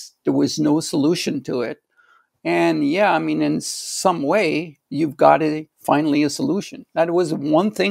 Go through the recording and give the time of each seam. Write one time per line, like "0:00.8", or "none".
none